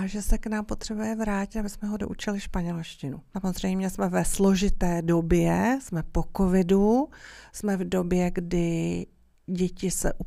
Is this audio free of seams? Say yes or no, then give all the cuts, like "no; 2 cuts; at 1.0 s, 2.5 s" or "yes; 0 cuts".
no; 1 cut; at 3.2 s